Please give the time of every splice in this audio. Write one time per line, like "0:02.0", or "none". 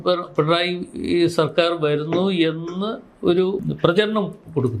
0:03.7